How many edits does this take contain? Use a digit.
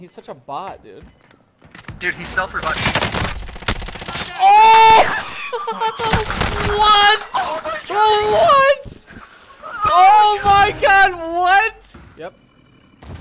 1